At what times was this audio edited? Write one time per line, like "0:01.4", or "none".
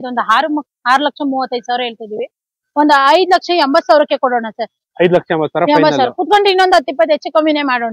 none